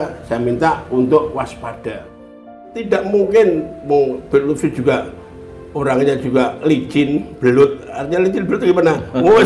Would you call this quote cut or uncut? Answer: cut